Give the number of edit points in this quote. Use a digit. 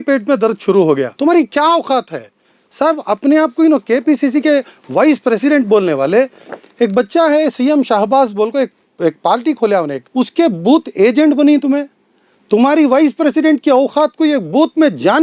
2